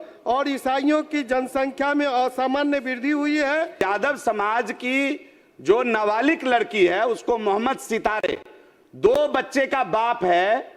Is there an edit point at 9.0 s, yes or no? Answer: no